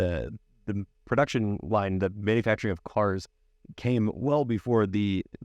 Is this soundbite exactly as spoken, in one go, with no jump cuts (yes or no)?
yes